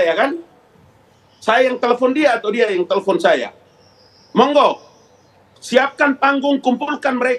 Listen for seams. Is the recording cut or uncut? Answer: uncut